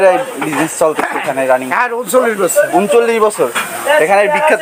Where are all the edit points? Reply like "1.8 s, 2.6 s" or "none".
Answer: none